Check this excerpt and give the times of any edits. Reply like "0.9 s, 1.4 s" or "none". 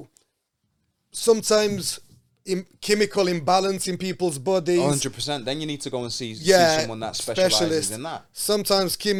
none